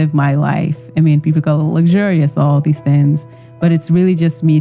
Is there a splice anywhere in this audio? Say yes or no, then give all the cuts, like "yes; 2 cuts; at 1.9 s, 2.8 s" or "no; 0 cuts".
no; 0 cuts